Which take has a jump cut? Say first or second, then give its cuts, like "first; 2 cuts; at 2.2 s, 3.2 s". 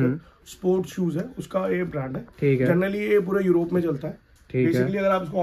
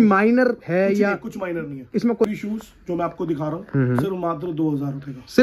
second; 1 cut; at 2.2 s